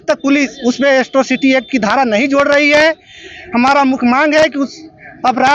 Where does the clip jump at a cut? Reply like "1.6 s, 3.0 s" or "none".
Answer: none